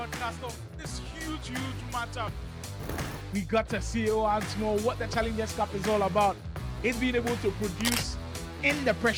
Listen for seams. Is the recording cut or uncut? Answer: uncut